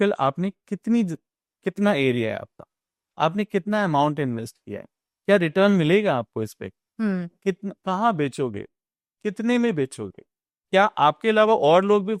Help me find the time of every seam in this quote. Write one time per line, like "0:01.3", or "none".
none

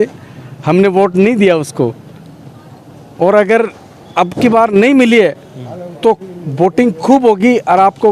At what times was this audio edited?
none

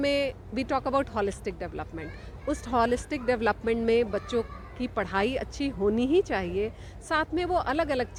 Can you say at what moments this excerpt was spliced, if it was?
none

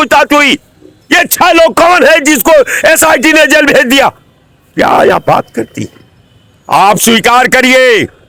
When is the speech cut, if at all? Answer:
none

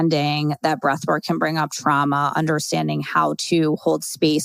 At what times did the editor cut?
none

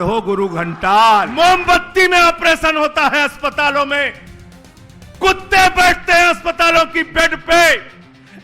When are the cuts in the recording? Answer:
0:01.3

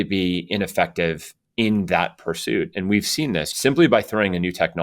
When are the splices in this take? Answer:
0:03.5

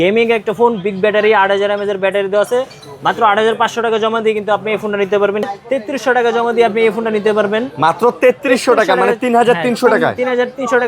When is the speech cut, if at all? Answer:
0:05.5

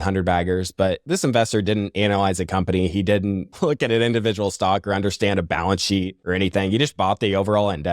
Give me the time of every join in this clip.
0:01.0
0:03.5
0:06.2

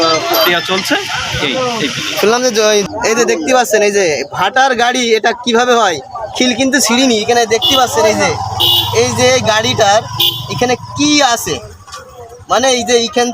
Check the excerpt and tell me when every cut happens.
0:02.8

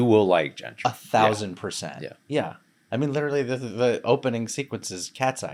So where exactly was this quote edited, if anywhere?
none

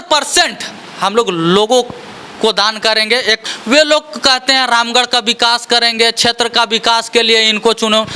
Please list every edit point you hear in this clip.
0:03.4

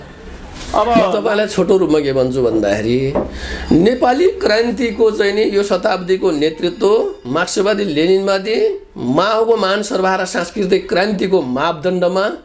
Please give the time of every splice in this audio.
0:01.1

